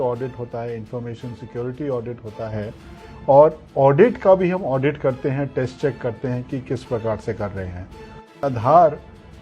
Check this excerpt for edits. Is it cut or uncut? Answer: cut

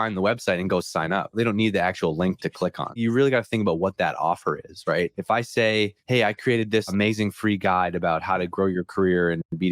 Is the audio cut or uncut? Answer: cut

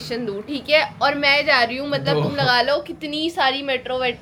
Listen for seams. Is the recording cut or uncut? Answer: uncut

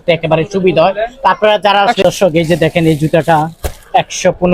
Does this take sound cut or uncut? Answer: cut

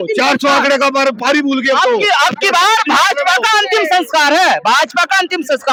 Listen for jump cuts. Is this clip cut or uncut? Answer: uncut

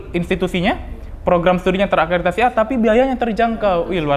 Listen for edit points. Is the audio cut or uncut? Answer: uncut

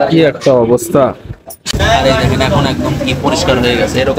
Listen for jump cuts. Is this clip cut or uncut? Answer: cut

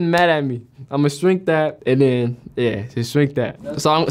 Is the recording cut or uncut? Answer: uncut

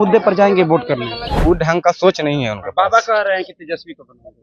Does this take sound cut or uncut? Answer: cut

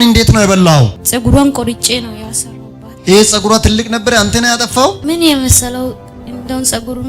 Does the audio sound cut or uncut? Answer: cut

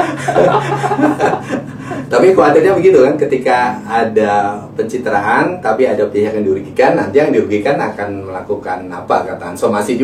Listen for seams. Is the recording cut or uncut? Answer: uncut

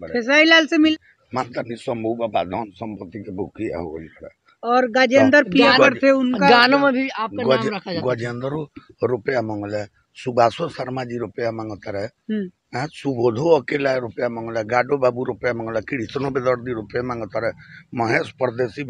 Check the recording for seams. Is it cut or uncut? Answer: cut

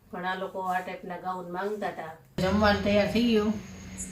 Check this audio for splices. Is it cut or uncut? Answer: cut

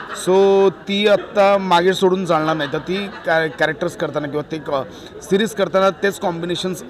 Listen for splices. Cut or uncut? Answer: uncut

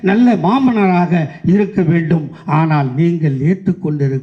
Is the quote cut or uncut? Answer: uncut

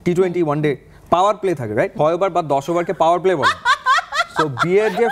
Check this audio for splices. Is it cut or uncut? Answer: cut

